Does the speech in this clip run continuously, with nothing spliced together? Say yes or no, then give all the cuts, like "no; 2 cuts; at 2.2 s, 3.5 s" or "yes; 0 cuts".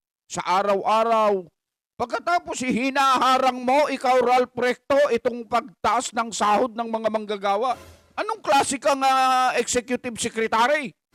yes; 0 cuts